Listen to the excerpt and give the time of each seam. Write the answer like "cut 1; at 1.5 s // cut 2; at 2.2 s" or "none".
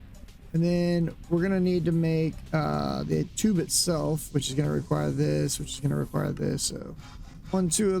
none